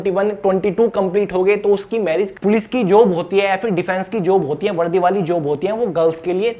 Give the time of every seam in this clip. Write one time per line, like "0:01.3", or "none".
0:02.3